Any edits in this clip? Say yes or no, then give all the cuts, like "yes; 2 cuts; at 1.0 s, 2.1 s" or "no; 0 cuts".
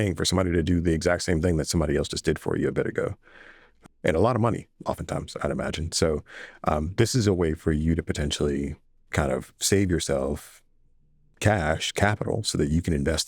yes; 1 cut; at 11.3 s